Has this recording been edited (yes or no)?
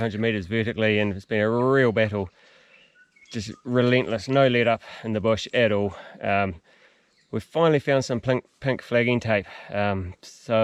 no